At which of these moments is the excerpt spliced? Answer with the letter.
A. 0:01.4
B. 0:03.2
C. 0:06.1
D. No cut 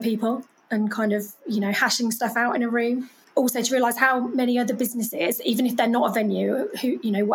B